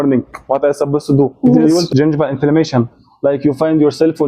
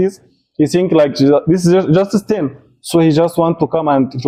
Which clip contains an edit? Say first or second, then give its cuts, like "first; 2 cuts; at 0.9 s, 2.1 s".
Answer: first; 1 cut; at 1.9 s